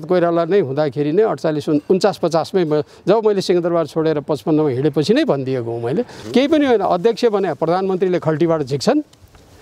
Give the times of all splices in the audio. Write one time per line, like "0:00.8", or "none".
0:06.2